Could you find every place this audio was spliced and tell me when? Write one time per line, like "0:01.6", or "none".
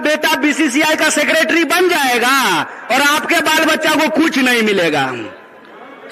none